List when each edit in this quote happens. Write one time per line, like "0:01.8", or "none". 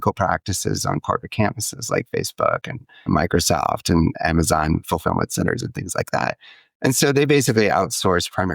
0:03.0